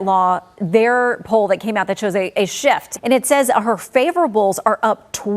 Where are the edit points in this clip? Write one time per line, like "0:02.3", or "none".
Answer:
0:02.9

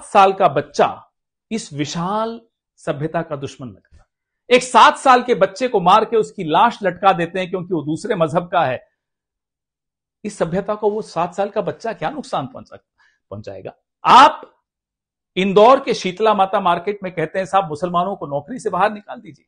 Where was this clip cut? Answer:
0:13.9

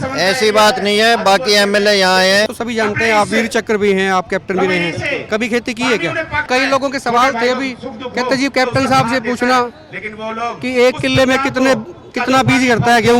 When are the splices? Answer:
0:02.5
0:06.4

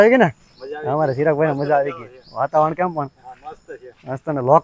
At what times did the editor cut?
none

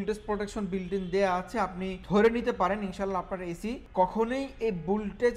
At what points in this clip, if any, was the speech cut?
0:01.9
0:03.8

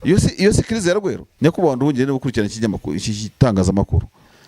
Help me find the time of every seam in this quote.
0:01.2

